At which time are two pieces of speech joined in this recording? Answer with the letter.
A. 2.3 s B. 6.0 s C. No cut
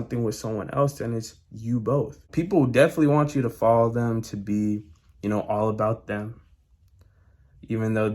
A